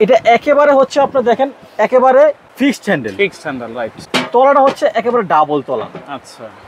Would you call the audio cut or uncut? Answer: cut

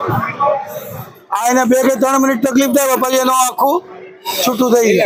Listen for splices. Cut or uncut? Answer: uncut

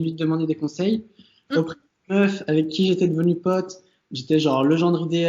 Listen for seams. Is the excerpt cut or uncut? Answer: uncut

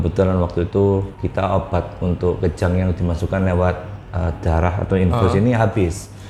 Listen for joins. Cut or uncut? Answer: uncut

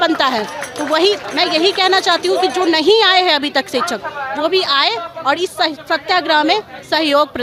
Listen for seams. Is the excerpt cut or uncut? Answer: uncut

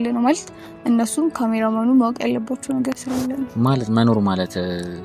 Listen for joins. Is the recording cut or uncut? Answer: cut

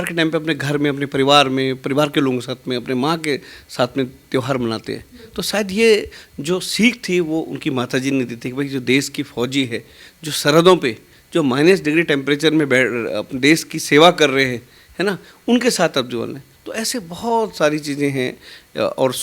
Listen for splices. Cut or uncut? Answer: uncut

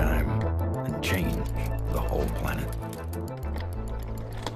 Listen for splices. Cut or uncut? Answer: uncut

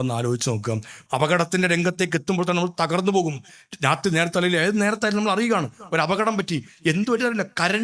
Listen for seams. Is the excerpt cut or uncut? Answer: cut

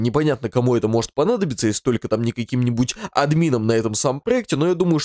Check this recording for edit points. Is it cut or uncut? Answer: uncut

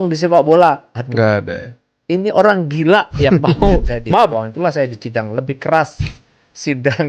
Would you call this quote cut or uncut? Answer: cut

